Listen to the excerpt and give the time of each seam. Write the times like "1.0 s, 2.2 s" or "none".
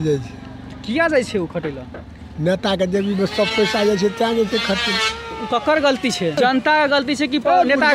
6.4 s

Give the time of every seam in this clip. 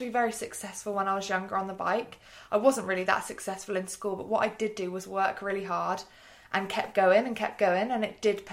none

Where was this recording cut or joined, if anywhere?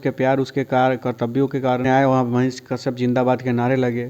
1.9 s

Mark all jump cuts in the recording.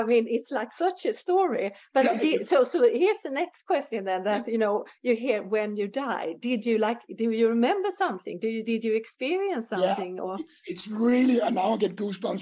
none

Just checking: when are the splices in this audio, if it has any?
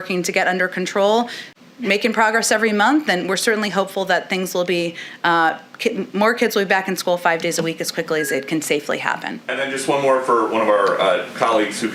none

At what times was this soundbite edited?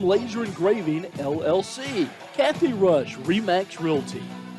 2.2 s

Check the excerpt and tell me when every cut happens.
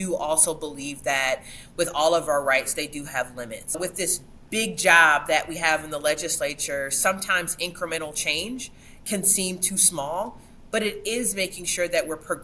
3.8 s

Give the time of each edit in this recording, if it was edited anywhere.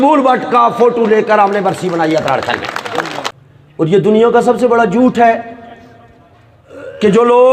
3.3 s

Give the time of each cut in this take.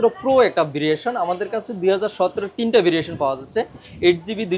none

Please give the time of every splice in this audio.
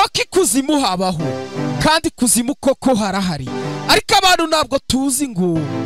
none

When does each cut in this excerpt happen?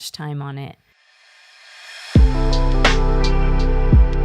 1.2 s

